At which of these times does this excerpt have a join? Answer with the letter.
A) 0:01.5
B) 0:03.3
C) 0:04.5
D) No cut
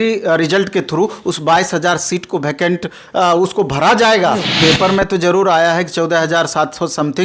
C